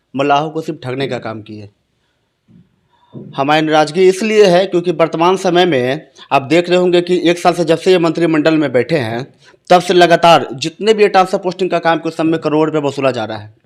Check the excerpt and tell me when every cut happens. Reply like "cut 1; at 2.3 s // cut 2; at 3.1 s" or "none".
none

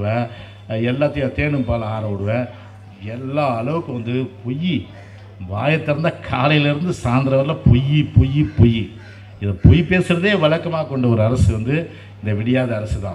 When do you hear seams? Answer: none

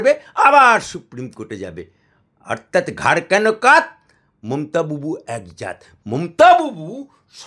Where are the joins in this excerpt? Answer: none

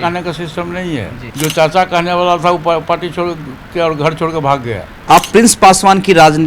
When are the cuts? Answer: cut 1; at 1.2 s // cut 2; at 4.9 s

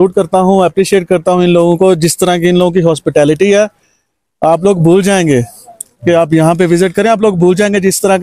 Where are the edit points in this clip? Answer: none

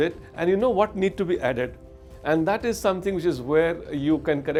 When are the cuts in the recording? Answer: none

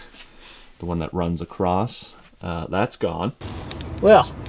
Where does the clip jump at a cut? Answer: cut 1; at 3.4 s

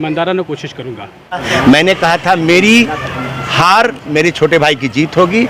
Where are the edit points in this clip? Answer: cut 1; at 1.5 s

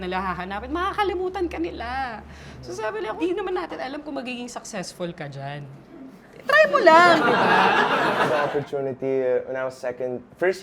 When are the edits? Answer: cut 1; at 3.2 s // cut 2; at 8.2 s

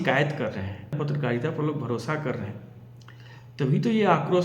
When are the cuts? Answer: cut 1; at 1.0 s

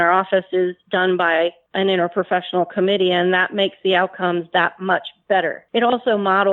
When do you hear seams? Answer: cut 1; at 1.6 s // cut 2; at 5.6 s

